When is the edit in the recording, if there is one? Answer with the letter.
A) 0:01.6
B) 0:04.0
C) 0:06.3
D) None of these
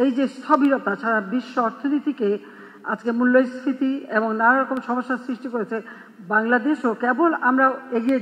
D